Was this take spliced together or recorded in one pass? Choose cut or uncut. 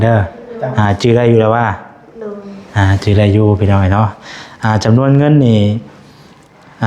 uncut